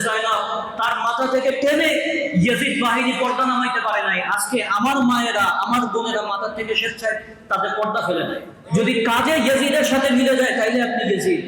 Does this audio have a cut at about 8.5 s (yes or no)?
yes